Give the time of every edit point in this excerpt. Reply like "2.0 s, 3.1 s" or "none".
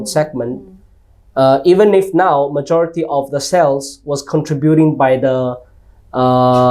none